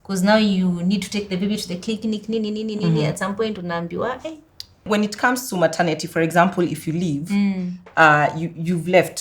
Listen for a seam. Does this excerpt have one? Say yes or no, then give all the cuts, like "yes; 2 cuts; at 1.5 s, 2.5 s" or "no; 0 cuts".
yes; 1 cut; at 4.8 s